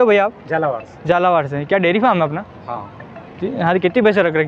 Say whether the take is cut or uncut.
uncut